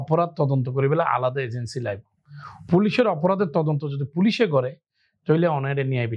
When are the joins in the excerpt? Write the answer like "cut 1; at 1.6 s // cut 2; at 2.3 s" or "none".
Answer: none